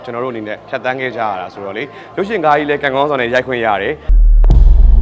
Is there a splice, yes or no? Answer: yes